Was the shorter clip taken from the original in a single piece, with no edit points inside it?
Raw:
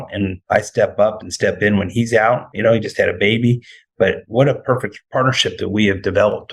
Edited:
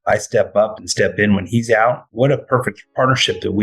no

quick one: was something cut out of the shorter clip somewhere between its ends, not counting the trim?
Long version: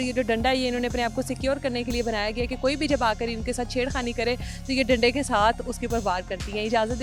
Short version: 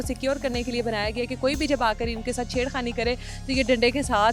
no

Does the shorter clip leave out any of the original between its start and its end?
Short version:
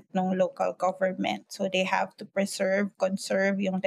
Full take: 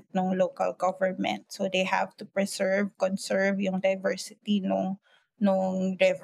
no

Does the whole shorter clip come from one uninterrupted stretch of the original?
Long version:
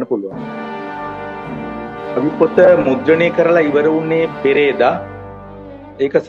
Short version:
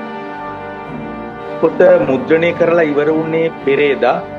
no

